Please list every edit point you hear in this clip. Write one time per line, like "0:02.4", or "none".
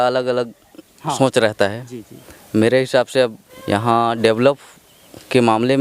0:03.5